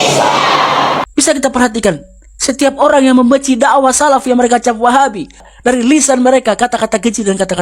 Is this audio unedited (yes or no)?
no